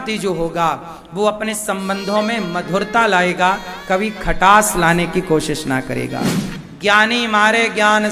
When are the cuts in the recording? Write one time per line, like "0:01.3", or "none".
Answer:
0:06.4